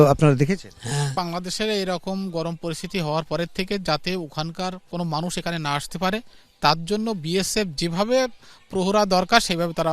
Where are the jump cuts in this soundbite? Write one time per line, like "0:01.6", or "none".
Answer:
0:01.1

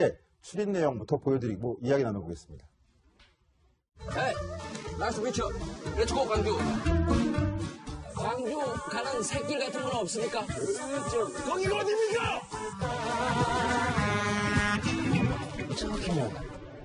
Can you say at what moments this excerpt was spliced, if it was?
none

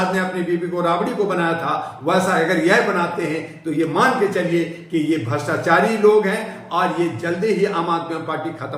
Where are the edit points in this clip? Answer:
none

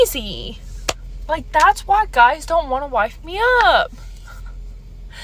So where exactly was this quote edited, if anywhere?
none

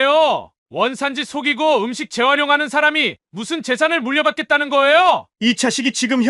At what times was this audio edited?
0:05.3

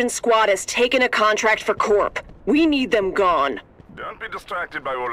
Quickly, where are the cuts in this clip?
0:03.9

